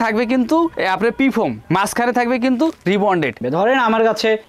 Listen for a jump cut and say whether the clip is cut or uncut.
cut